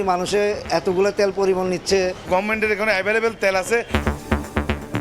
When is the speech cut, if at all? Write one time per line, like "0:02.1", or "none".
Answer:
0:02.2
0:03.9